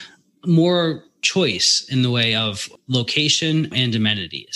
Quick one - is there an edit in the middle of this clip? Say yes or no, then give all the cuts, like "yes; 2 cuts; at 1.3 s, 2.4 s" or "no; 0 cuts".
yes; 3 cuts; at 1.2 s, 2.7 s, 3.7 s